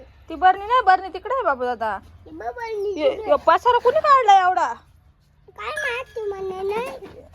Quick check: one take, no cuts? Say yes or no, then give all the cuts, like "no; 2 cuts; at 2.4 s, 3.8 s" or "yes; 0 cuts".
yes; 0 cuts